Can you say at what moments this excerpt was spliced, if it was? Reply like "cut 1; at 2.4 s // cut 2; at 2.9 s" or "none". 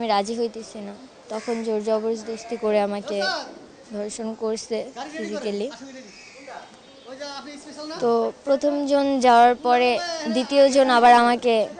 none